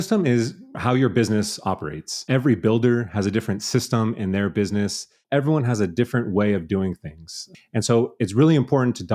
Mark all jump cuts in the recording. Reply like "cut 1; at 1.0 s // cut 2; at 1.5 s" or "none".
cut 1; at 2.2 s // cut 2; at 5.2 s